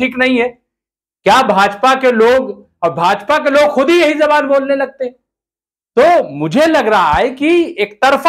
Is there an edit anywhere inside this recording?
no; 0 cuts

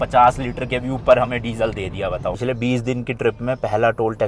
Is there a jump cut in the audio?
yes; 1 cut; at 2.3 s

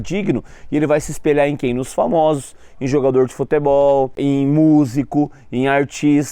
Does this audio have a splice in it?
yes; 1 cut; at 4.2 s

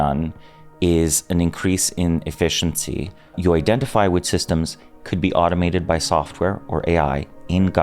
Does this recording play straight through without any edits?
no; 1 cut; at 3.4 s

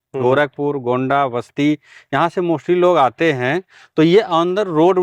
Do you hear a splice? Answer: no; 0 cuts

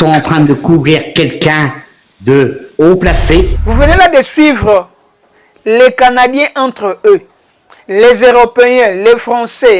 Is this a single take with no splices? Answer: no; 1 cut; at 3.6 s

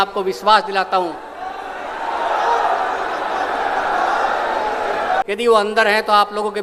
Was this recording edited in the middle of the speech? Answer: yes; 1 cut; at 5.2 s

